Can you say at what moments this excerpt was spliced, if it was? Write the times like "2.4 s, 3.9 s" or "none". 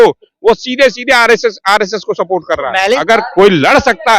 3.0 s